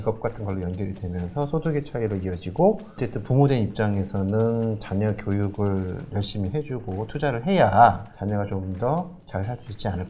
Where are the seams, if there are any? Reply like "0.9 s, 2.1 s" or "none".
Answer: 3.0 s